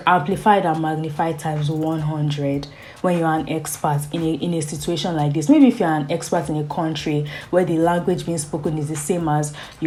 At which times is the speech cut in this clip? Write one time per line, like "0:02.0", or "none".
none